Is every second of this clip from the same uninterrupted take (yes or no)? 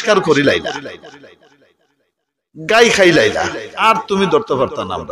yes